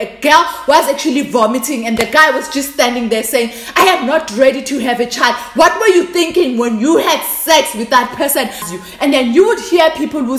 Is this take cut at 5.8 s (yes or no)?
no